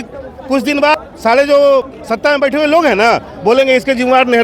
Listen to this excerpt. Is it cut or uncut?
cut